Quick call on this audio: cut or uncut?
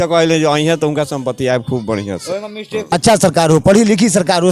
cut